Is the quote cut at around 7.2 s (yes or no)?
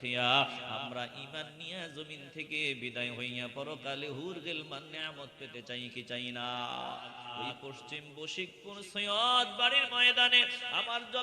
yes